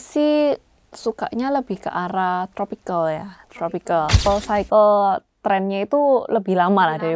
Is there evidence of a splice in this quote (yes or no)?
yes